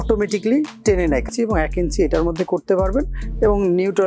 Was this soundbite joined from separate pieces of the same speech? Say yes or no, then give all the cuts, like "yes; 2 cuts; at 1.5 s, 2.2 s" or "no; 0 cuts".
yes; 1 cut; at 1.3 s